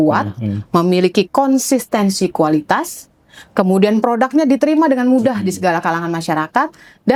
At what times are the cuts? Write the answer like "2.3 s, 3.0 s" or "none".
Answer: none